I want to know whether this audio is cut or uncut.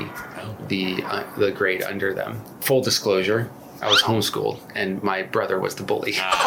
uncut